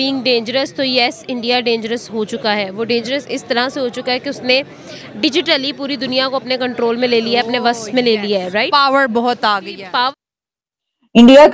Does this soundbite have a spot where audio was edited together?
yes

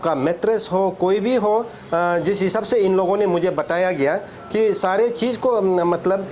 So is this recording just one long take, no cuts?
yes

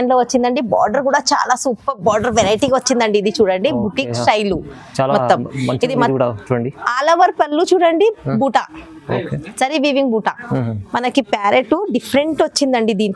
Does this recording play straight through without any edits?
yes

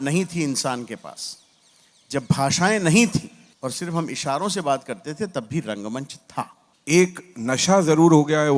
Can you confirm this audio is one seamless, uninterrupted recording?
no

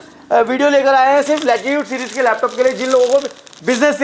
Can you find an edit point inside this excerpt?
no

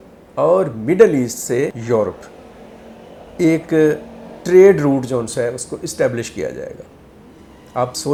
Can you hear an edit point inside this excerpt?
no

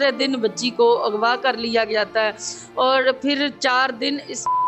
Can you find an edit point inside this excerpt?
no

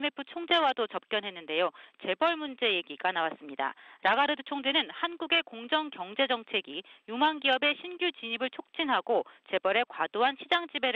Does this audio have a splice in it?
no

